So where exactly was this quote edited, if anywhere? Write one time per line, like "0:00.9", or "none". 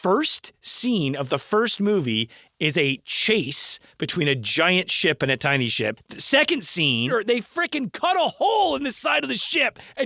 0:06.1
0:07.1